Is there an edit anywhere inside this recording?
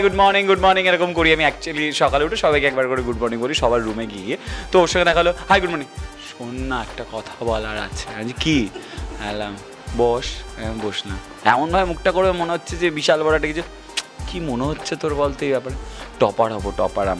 no; 0 cuts

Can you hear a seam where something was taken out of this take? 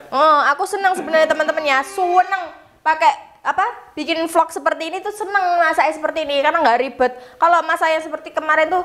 no; 0 cuts

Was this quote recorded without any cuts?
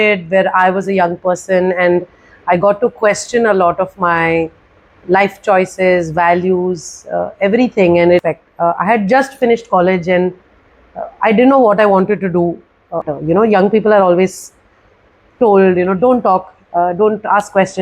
no; 2 cuts; at 8.2 s, 13.0 s

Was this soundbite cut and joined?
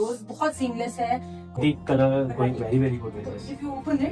yes; 1 cut; at 1.6 s

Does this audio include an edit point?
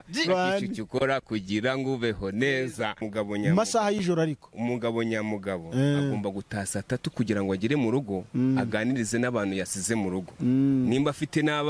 yes; 1 cut; at 3.0 s

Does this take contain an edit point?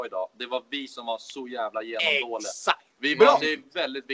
no; 0 cuts

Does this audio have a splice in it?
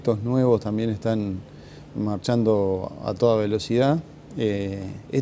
yes; 1 cut; at 3.5 s

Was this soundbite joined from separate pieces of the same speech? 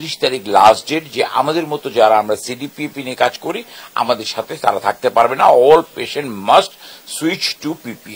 no; 0 cuts

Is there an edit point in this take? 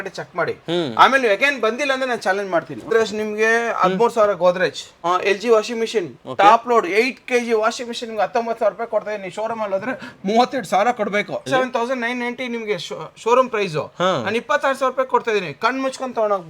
yes; 3 cuts; at 2.9 s, 4.9 s, 11.5 s

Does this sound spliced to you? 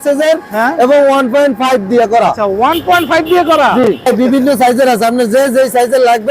yes; 1 cut; at 4.1 s

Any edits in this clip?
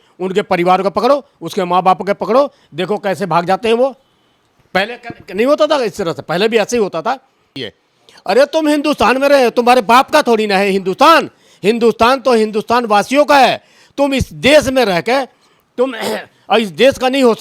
yes; 1 cut; at 7.6 s

